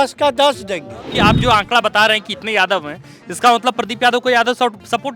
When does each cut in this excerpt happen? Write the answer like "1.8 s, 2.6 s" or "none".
1.0 s